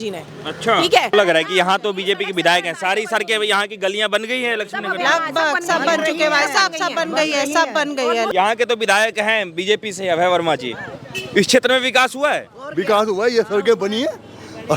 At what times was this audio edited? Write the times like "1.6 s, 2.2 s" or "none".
1.1 s, 8.3 s